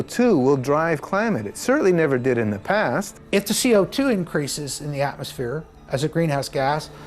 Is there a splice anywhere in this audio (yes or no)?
yes